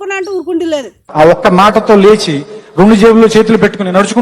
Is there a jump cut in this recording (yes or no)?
yes